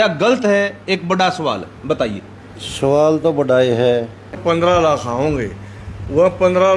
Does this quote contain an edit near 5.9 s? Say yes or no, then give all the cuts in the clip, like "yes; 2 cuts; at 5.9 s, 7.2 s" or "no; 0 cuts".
no; 1 cut; at 4.4 s